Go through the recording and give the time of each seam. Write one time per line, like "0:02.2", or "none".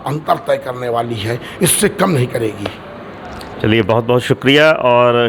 none